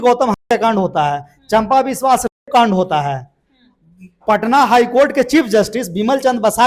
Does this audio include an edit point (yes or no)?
no